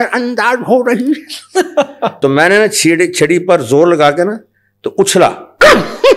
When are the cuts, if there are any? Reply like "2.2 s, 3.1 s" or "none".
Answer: 2.1 s